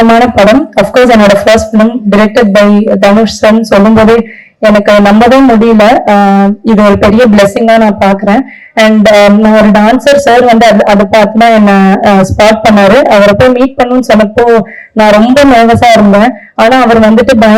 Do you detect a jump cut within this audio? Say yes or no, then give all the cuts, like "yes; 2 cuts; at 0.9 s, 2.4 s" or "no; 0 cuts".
no; 0 cuts